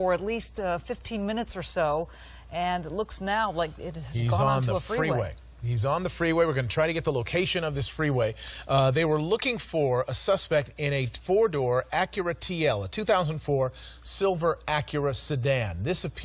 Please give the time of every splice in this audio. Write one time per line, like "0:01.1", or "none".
0:05.8